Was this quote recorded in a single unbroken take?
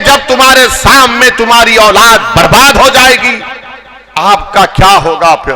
no; 1 cut; at 4.0 s

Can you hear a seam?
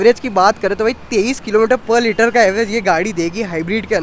no; 0 cuts

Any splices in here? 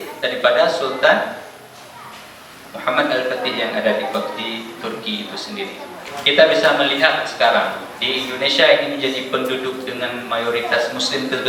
yes; 1 cut; at 6.0 s

